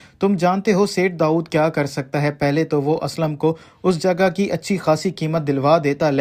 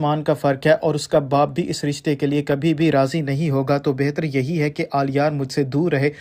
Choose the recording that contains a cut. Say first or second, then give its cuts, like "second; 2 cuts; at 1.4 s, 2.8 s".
second; 1 cut; at 4.2 s